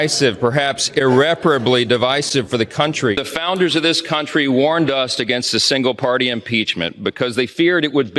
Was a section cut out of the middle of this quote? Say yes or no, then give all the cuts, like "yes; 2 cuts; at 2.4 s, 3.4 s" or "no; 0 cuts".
no; 0 cuts